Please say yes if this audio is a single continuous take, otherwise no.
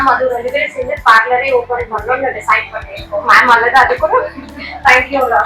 yes